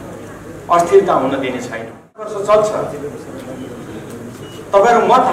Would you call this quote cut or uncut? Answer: cut